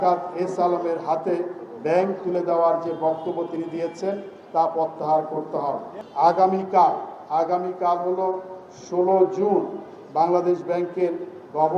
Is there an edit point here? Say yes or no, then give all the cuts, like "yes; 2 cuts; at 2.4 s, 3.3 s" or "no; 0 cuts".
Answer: no; 0 cuts